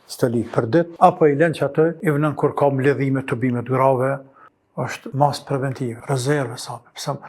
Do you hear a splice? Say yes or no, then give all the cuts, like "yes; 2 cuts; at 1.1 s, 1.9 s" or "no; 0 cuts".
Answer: yes; 4 cuts; at 0.9 s, 2.0 s, 4.5 s, 6.0 s